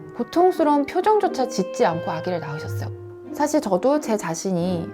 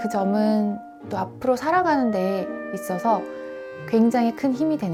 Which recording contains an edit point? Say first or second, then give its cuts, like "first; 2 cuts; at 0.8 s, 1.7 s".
first; 1 cut; at 2.9 s